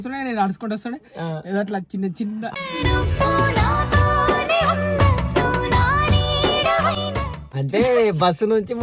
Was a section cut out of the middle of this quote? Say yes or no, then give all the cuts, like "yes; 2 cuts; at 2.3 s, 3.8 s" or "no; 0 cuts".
no; 0 cuts